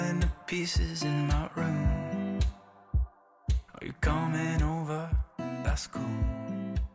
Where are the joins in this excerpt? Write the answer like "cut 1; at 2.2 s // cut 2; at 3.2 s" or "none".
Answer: none

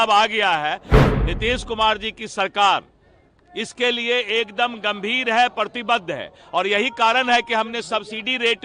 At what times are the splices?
cut 1; at 0.9 s

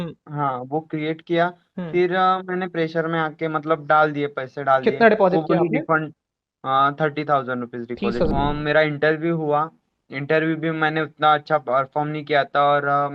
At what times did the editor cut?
cut 1; at 8.3 s

